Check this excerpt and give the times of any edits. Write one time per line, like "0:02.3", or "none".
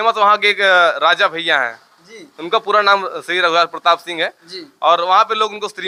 none